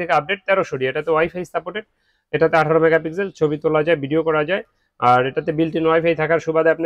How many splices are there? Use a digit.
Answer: 0